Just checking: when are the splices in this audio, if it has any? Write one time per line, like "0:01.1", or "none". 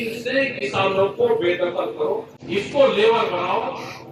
0:02.4